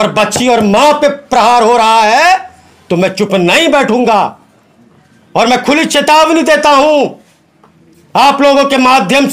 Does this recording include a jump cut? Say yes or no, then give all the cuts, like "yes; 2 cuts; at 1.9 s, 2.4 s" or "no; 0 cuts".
no; 0 cuts